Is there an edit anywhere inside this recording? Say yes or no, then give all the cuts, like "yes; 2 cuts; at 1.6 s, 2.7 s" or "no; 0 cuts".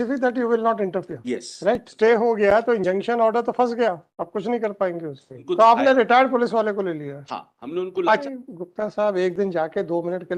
yes; 3 cuts; at 1.9 s, 5.3 s, 8.2 s